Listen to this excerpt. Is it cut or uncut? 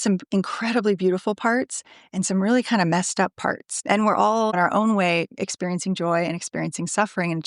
cut